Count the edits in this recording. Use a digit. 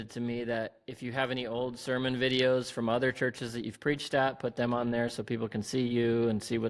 0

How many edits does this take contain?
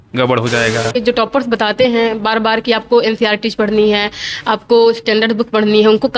1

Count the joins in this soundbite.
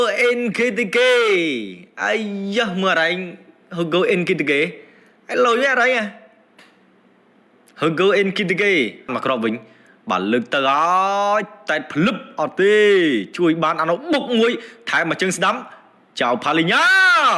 1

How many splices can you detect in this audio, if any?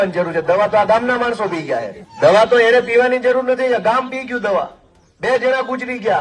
0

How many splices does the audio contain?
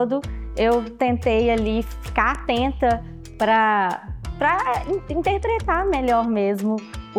0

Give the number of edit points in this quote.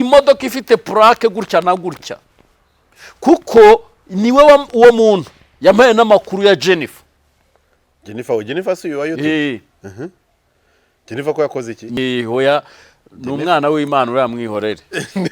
1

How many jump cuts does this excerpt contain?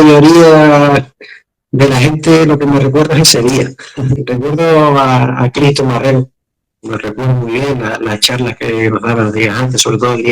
1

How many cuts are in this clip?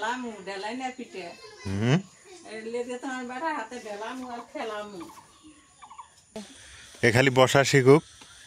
1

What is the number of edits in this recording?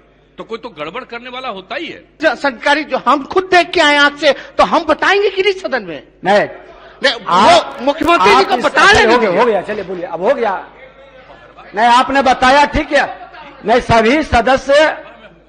1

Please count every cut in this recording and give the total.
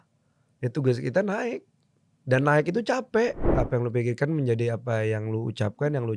1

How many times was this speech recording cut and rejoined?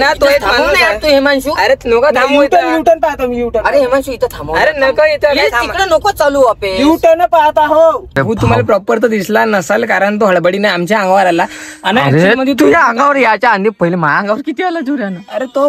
1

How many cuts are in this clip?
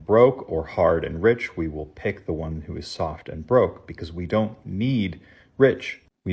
0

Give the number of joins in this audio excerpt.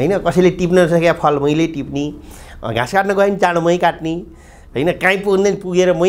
0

